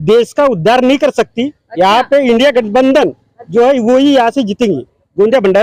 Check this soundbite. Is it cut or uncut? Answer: uncut